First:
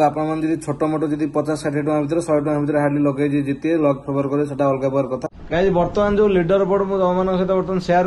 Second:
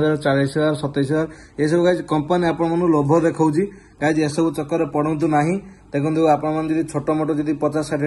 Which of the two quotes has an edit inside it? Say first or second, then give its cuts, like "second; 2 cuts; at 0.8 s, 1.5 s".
first; 1 cut; at 5.3 s